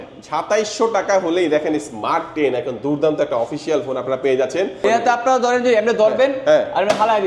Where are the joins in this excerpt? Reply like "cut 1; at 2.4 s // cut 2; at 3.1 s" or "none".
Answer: cut 1; at 4.8 s